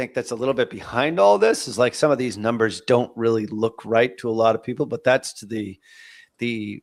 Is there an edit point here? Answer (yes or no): no